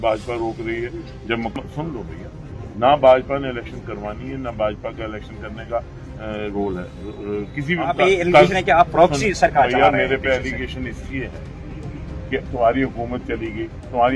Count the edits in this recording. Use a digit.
2